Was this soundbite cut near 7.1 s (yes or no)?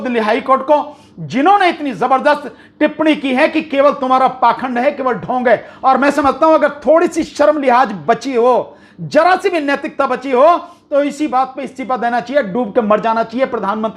no